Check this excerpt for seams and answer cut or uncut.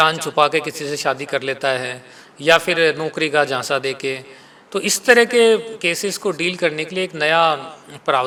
uncut